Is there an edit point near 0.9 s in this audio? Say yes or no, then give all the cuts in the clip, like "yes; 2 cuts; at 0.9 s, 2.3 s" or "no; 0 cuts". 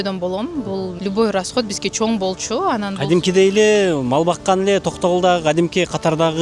yes; 1 cut; at 0.9 s